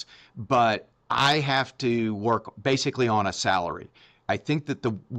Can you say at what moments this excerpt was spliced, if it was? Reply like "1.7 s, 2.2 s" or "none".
none